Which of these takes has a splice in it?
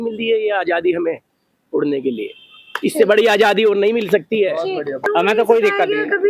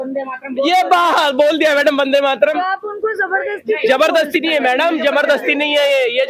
first; 1 cut; at 5.0 s

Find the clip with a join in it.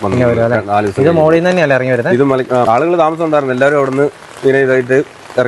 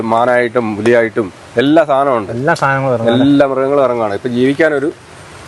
first; 1 cut; at 2.6 s

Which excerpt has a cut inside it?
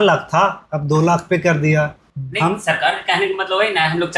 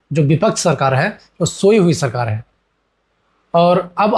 first; 1 cut; at 2.0 s

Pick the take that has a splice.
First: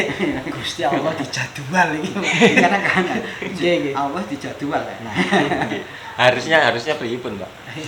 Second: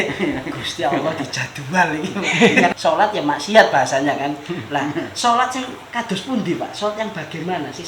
second; 1 cut; at 2.8 s

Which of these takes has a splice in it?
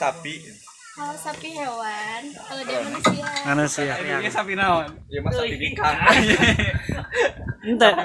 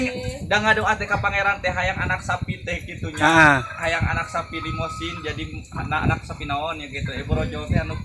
first; 1 cut; at 4.2 s

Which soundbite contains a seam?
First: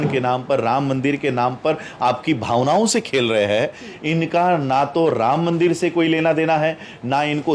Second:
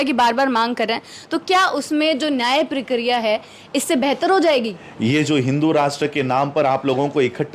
second; 1 cut; at 4.8 s

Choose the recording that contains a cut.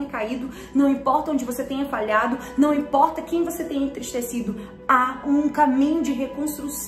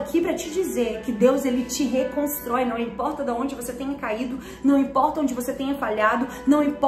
first; 1 cut; at 5.2 s

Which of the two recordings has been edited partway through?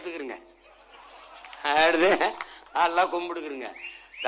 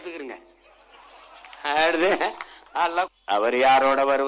second; 1 cut; at 3.1 s

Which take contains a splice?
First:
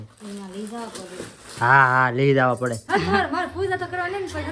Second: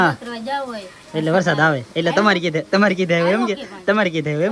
first; 1 cut; at 2.8 s

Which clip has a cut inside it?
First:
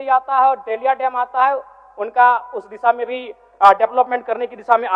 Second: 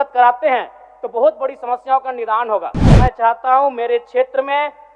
second; 1 cut; at 3.0 s

